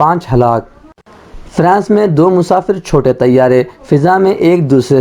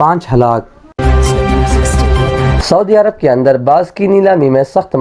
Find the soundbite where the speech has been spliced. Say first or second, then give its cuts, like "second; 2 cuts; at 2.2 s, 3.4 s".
second; 2 cuts; at 1.0 s, 2.6 s